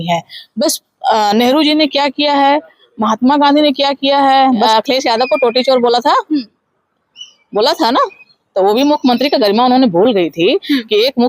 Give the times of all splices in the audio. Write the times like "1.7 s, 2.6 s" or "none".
4.7 s